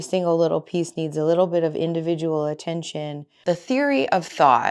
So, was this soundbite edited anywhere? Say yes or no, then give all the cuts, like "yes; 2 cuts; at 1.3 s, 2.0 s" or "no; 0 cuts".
yes; 1 cut; at 3.4 s